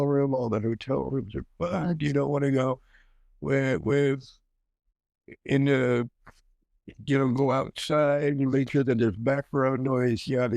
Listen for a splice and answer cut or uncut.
uncut